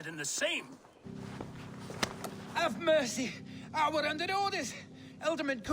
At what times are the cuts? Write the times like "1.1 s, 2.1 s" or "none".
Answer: 1.0 s